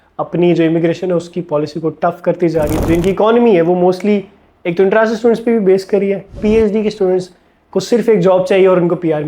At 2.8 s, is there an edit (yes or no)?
yes